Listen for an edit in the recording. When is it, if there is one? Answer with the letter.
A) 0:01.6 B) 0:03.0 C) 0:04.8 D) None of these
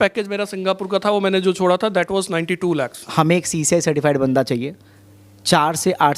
B